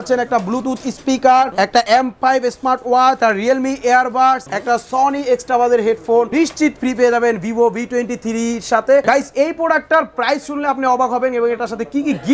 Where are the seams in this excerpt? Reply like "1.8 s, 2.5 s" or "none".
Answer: 1.8 s, 3.2 s, 4.5 s, 6.3 s, 9.0 s